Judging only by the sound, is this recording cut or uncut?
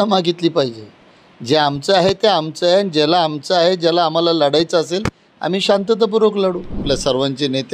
cut